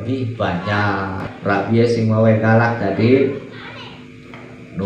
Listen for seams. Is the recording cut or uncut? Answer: cut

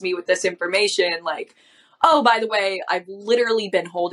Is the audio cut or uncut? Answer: uncut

